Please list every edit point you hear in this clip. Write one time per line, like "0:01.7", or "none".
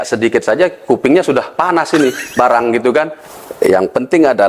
0:03.2